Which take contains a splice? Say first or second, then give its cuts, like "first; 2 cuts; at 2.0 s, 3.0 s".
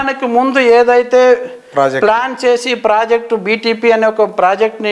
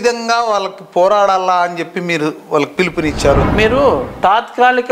second; 1 cut; at 3.5 s